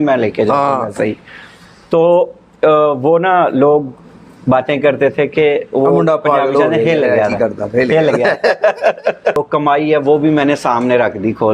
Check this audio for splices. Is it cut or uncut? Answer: cut